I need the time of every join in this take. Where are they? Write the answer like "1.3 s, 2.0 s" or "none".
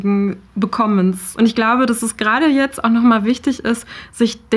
1.2 s